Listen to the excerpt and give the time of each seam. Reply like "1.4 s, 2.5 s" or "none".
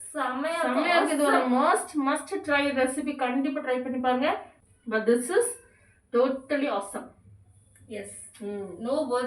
4.5 s